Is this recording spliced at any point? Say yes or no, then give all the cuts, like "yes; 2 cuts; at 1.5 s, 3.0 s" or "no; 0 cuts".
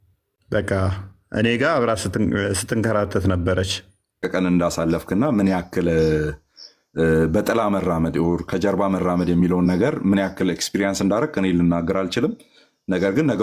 yes; 1 cut; at 4.2 s